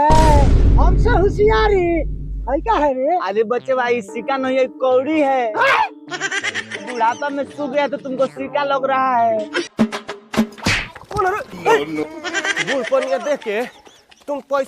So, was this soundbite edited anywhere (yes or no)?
yes